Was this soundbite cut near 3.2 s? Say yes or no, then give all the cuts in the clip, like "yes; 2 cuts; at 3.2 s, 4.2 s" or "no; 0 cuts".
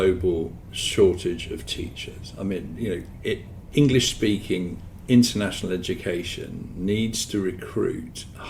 no; 0 cuts